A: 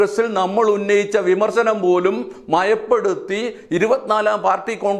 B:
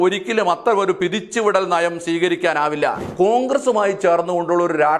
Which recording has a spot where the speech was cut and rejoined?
B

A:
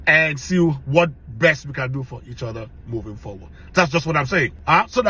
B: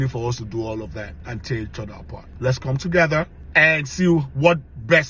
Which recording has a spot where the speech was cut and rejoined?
B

